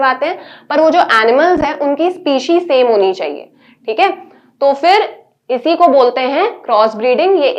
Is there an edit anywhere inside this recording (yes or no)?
no